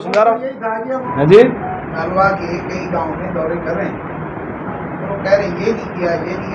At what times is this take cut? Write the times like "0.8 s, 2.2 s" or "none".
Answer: 1.1 s